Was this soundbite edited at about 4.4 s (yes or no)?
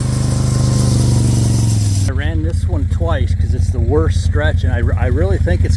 no